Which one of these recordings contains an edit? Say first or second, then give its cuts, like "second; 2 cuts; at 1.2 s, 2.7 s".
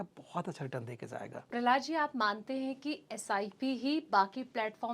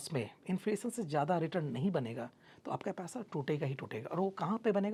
first; 1 cut; at 1.4 s